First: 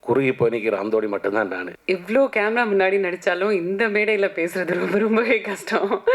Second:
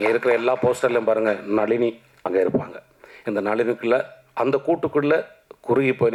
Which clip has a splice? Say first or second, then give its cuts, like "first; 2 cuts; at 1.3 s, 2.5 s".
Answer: first; 1 cut; at 1.7 s